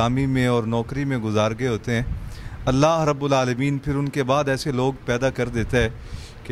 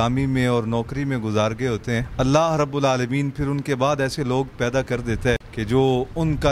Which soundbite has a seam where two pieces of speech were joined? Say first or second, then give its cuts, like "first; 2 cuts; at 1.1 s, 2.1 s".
second; 2 cuts; at 2.1 s, 5.5 s